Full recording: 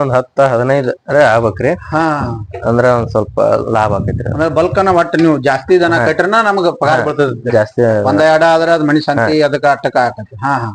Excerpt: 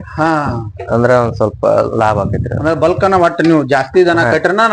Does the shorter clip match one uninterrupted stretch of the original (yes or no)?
yes